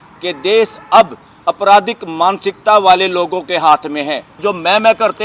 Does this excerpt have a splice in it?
yes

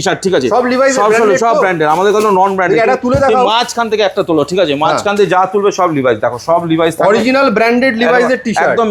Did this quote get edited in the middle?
no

